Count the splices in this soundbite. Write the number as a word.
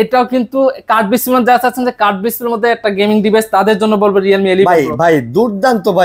zero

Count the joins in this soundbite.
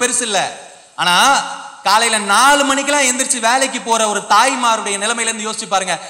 zero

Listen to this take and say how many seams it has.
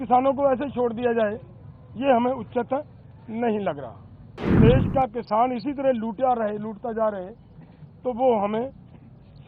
one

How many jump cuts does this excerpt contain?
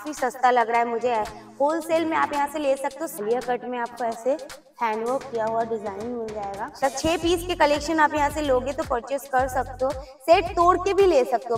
two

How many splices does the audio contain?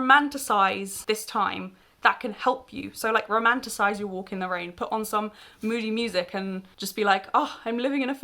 one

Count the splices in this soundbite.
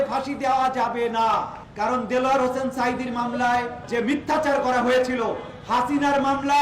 two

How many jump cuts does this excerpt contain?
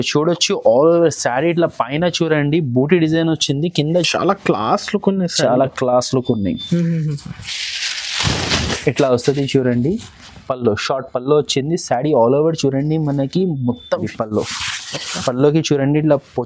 two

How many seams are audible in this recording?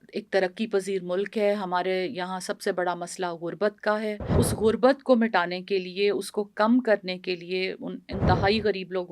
one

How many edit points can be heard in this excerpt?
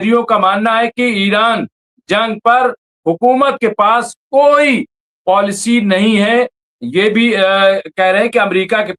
zero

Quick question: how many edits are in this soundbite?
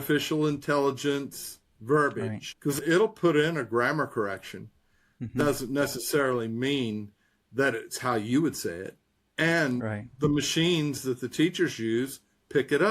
three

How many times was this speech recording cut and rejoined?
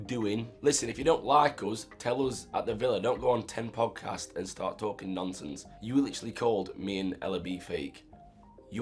zero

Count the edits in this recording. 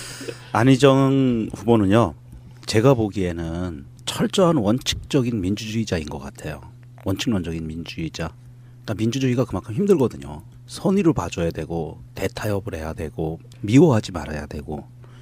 one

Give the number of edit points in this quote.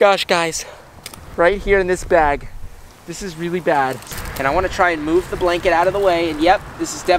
one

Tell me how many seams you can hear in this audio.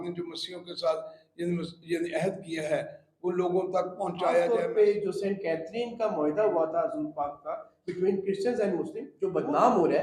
two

